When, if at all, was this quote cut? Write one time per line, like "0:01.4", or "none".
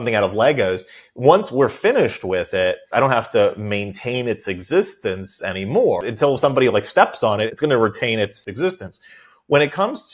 0:02.9
0:06.0
0:07.5
0:08.5